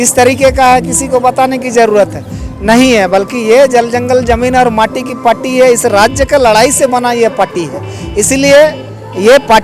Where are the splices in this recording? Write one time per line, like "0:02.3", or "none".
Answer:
none